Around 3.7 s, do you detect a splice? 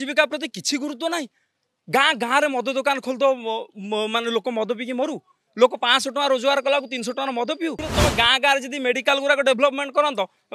no; 1 cut; at 7.8 s

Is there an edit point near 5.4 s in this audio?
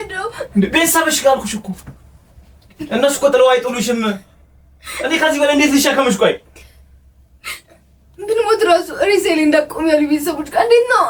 no; 0 cuts

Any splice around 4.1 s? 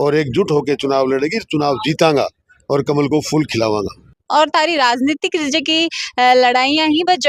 yes; 1 cut; at 4.1 s

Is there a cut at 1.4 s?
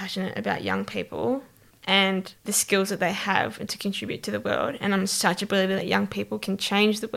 no; 0 cuts

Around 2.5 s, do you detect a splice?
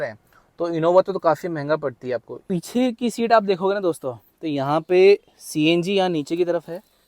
yes; 1 cut; at 2.5 s

